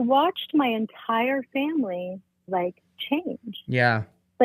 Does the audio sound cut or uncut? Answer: cut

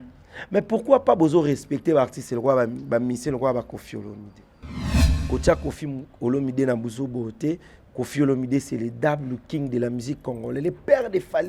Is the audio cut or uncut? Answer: cut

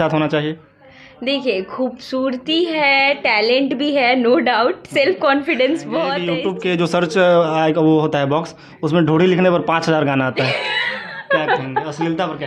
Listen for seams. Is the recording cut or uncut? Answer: cut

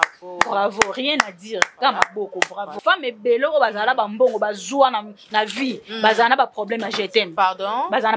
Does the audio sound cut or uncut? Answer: cut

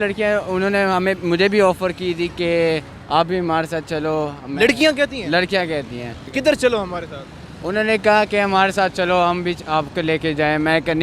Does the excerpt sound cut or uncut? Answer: uncut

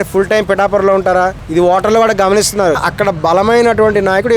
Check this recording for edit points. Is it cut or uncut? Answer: cut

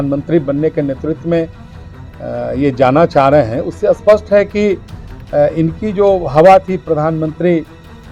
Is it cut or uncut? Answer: uncut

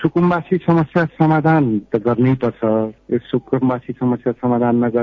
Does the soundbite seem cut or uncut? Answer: uncut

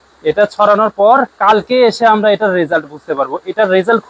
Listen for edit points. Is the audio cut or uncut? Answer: cut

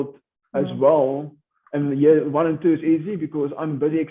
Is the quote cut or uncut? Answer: uncut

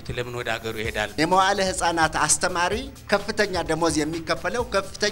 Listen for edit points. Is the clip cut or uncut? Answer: cut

